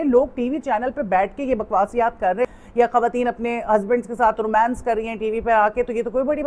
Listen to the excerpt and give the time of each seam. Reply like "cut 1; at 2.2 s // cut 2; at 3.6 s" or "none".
cut 1; at 2.5 s